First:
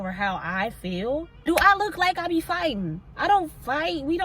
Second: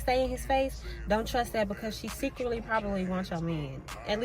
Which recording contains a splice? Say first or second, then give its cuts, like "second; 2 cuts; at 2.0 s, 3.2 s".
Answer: first; 1 cut; at 1.3 s